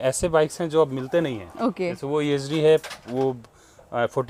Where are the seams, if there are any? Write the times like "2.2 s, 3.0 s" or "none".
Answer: none